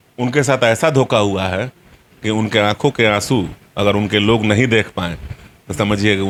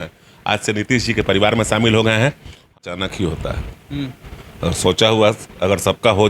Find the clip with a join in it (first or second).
second